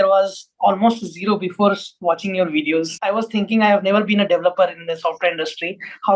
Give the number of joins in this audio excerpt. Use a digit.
1